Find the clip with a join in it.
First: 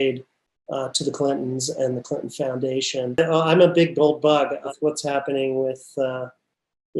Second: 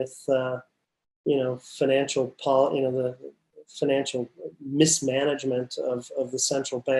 first; 2 cuts; at 3.2 s, 4.7 s

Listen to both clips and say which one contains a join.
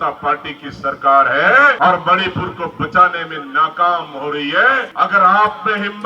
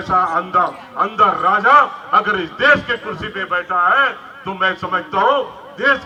first; 2 cuts; at 1.8 s, 4.9 s

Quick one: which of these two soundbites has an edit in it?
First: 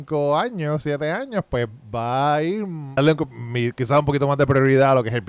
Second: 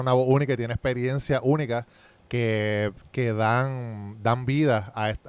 first; 1 cut; at 3.0 s

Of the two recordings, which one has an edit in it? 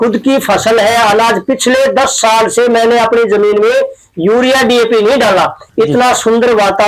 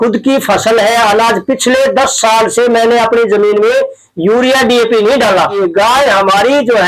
second; 1 cut; at 5.6 s

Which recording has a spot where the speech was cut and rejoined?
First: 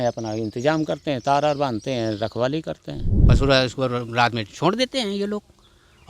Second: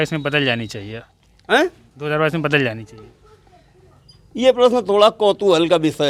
first; 1 cut; at 3.1 s

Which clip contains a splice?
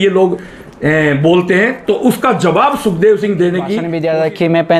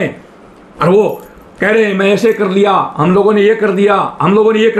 first; 1 cut; at 3.9 s

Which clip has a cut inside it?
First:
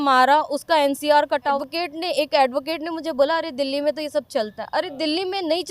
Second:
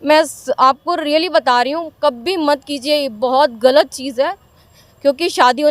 first; 1 cut; at 1.6 s

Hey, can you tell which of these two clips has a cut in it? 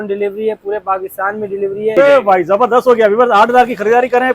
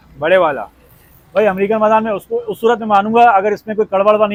first; 1 cut; at 2.0 s

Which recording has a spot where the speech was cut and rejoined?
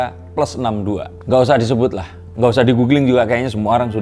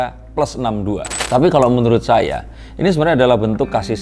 second; 1 cut; at 1.1 s

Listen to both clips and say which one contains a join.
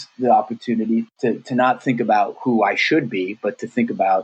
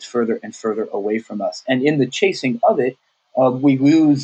first; 1 cut; at 1.1 s

